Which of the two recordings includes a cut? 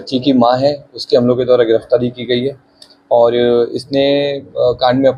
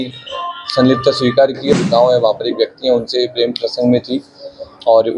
second; 1 cut; at 1.7 s

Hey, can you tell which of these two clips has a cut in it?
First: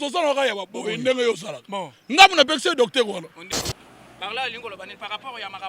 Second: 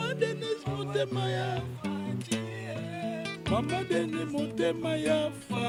first; 1 cut; at 3.4 s

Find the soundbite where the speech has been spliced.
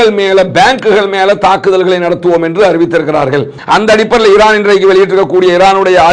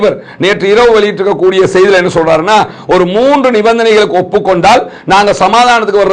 first; 1 cut; at 3.5 s

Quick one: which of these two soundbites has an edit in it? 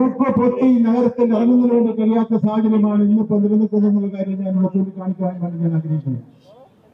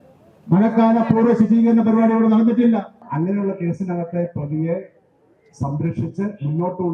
second; 1 cut; at 3.1 s

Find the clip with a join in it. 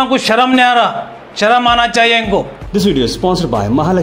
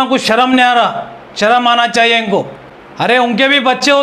first; 1 cut; at 2.6 s

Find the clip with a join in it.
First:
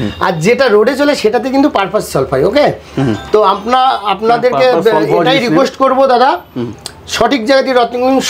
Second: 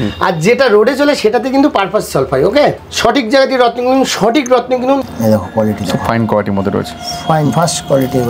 second; 2 cuts; at 2.8 s, 5.0 s

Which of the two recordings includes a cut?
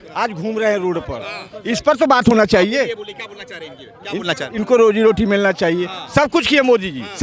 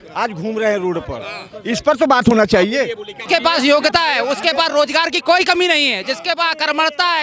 second; 1 cut; at 3.2 s

